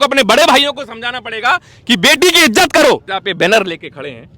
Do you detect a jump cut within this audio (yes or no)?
yes